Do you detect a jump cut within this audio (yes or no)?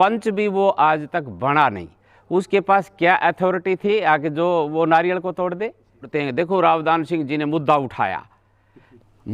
yes